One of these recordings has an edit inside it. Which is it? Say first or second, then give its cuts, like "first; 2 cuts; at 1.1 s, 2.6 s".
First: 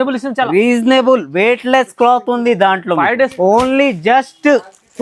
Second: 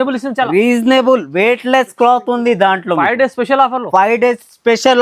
first; 1 cut; at 3.3 s